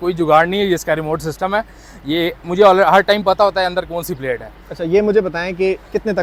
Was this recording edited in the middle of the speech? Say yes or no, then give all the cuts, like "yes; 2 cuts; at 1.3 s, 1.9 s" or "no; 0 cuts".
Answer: no; 0 cuts